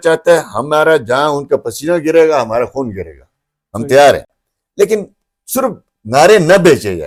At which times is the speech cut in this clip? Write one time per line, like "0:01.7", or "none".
none